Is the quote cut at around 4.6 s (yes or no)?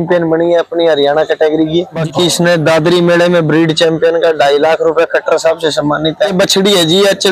no